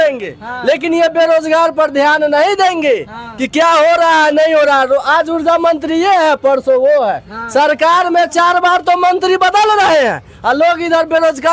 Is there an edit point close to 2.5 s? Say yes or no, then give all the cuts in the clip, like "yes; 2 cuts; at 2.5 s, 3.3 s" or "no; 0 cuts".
no; 0 cuts